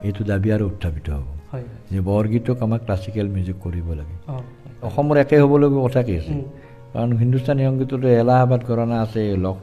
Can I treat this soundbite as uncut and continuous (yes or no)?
no